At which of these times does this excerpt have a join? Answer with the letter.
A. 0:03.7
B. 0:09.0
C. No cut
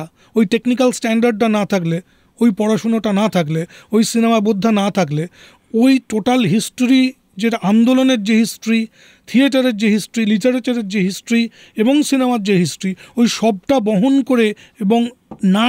C